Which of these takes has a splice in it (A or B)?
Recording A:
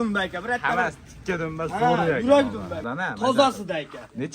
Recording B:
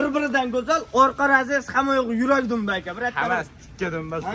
A